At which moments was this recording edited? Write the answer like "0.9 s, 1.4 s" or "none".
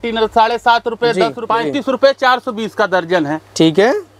1.4 s